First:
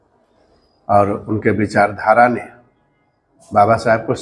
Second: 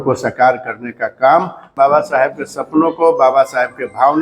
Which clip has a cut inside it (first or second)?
second